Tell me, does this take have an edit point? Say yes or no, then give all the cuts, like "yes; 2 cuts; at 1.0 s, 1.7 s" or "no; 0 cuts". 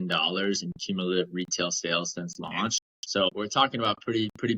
yes; 1 cut; at 3.3 s